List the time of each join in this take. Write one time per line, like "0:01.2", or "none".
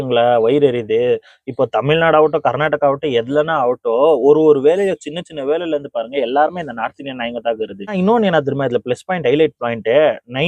0:07.9